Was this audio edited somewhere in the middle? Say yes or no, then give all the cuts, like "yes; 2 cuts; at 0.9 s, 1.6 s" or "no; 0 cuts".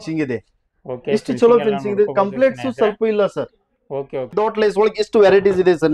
yes; 1 cut; at 4.3 s